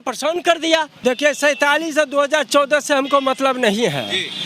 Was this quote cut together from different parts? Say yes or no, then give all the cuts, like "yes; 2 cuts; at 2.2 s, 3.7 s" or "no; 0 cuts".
yes; 1 cut; at 0.9 s